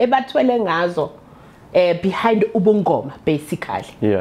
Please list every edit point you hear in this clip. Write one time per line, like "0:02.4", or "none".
none